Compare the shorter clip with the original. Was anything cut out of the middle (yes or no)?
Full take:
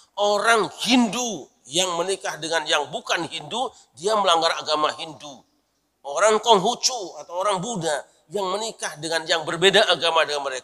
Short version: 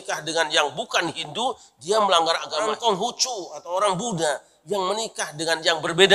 yes